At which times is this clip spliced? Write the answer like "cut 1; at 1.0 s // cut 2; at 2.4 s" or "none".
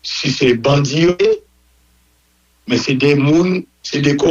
none